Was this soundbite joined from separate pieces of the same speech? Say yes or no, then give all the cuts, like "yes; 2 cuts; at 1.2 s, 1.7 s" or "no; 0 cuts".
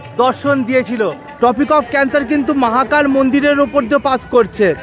yes; 1 cut; at 1.2 s